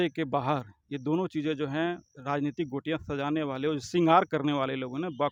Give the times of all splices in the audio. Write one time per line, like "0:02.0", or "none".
none